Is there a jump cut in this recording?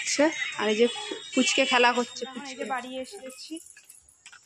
yes; 1 cut; at 2.4 s

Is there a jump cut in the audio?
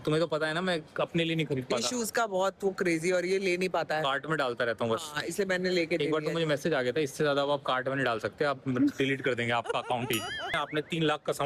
yes; 1 cut; at 10.6 s

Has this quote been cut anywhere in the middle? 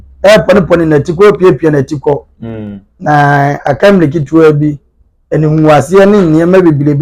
no; 0 cuts

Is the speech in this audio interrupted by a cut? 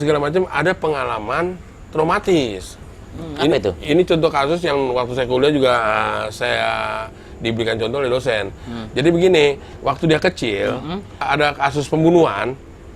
yes; 1 cut; at 11.2 s

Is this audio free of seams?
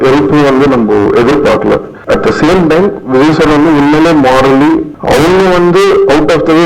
no; 2 cuts; at 1.9 s, 4.9 s

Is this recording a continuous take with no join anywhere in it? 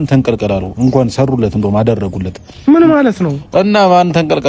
yes; 0 cuts

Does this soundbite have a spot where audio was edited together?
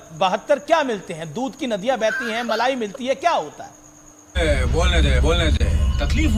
no; 0 cuts

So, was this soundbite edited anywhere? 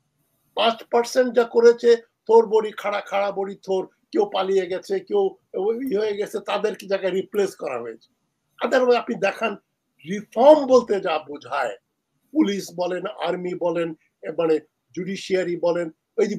no; 0 cuts

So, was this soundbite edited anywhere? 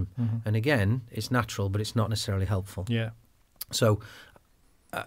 no; 0 cuts

